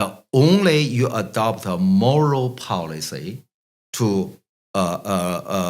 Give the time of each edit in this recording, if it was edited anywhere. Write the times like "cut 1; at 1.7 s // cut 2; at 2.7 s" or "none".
none